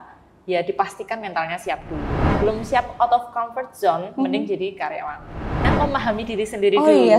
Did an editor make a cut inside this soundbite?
yes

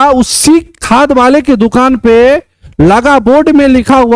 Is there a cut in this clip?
no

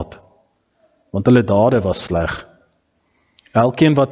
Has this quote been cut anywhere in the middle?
no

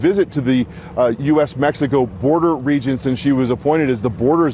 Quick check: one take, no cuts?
yes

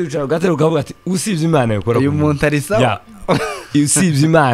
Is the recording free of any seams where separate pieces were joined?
yes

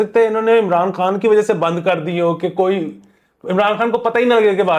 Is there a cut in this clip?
no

